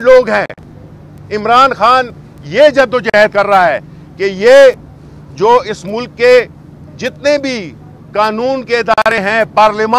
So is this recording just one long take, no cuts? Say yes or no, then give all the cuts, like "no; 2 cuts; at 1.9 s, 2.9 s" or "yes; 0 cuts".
yes; 0 cuts